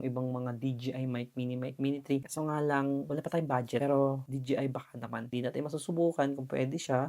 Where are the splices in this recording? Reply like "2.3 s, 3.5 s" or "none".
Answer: 5.3 s